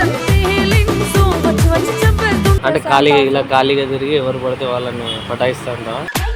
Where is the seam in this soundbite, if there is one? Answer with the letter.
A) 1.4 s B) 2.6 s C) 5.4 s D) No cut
B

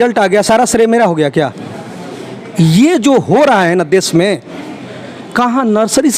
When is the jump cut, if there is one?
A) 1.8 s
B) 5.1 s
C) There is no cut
C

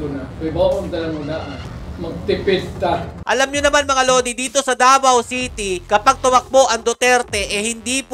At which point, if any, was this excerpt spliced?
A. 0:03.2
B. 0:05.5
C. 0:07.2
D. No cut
A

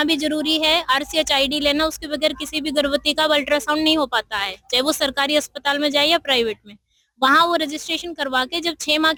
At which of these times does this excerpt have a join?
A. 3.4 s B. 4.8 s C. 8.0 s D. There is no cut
D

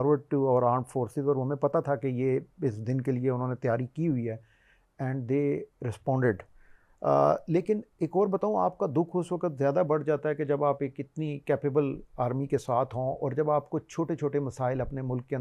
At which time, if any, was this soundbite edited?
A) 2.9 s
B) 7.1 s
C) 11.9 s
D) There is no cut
D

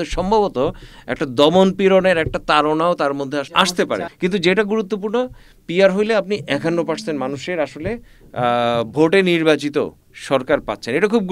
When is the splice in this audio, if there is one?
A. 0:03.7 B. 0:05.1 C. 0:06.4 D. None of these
A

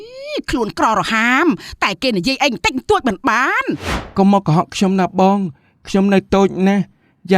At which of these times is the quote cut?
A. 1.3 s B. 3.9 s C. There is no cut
B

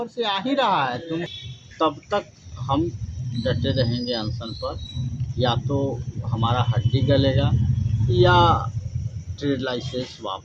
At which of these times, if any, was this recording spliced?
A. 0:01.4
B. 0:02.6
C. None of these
A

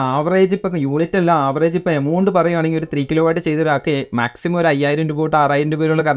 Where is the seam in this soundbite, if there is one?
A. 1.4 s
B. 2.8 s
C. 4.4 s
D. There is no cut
D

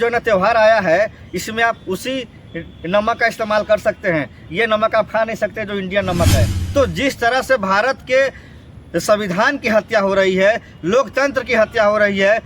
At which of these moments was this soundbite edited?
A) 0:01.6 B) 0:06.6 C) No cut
B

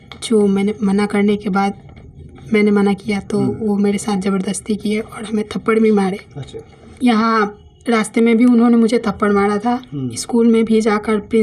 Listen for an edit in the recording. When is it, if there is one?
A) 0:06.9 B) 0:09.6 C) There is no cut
A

